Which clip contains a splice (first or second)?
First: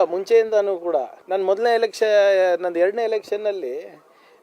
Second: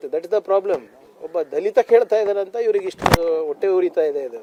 first